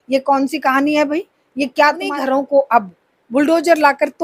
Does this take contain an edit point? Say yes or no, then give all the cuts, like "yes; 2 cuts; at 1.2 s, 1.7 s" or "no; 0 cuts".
yes; 1 cut; at 2.1 s